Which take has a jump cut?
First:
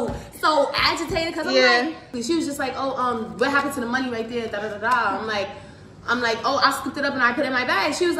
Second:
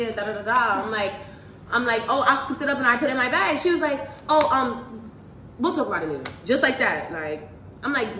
first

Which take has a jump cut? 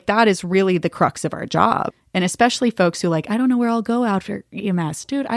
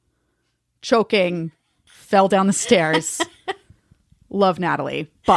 first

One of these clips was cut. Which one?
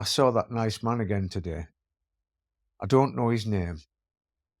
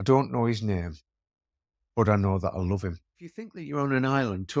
second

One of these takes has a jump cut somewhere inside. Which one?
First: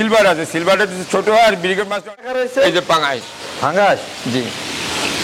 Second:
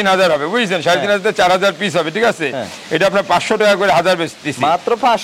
first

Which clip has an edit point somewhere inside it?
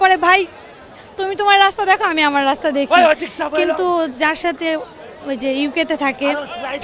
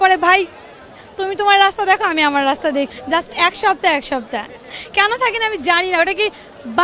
second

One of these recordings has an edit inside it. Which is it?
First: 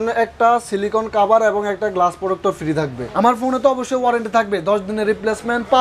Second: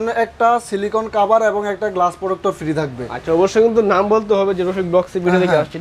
first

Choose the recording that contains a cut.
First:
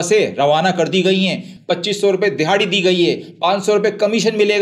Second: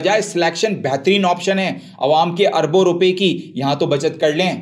first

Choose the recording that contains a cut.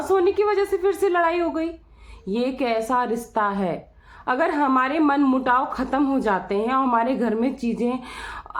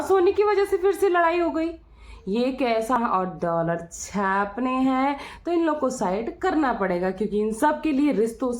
second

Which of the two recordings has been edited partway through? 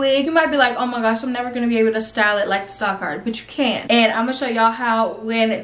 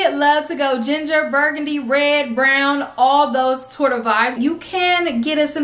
second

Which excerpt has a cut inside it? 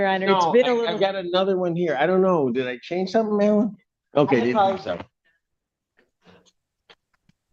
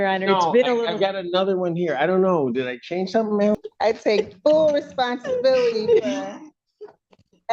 second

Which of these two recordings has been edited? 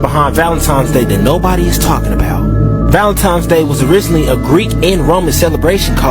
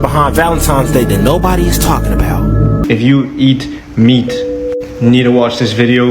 second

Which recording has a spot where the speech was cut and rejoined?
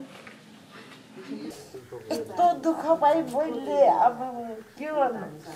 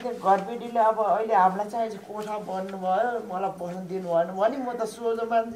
first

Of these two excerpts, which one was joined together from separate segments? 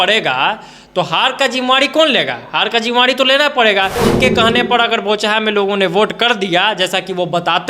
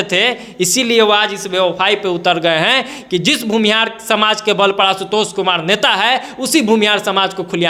first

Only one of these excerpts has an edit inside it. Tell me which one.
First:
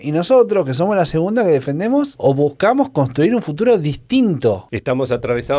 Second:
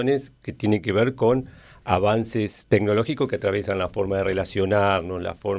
first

